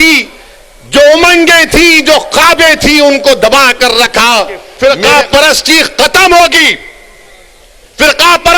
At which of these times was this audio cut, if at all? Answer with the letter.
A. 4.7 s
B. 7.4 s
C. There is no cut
A